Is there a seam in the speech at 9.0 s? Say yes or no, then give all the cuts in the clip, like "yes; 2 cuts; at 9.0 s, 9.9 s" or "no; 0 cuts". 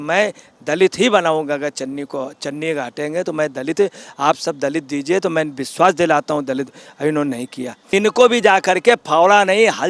no; 1 cut; at 7.7 s